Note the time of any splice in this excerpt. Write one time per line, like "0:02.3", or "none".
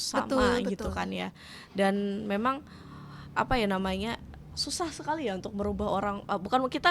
none